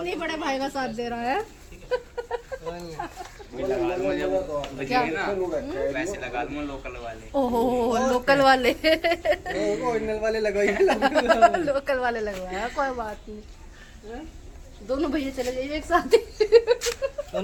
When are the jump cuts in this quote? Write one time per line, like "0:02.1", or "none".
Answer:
none